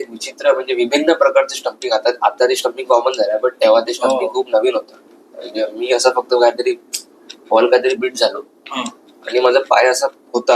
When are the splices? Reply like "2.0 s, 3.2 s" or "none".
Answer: none